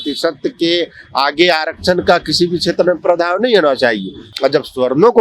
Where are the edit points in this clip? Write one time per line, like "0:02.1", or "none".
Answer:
0:04.3